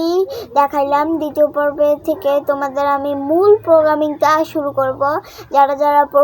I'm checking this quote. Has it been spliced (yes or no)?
no